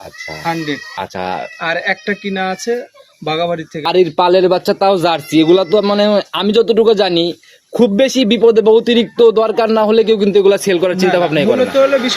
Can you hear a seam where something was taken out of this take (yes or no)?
yes